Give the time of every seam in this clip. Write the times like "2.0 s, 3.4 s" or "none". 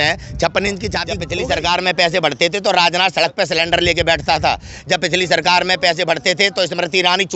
1.2 s